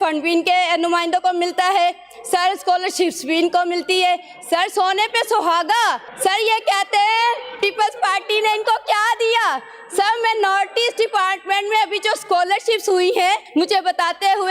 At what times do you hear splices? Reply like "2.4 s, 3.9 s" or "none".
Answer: 6.1 s, 13.4 s

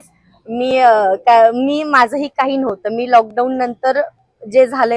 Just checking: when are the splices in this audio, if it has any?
none

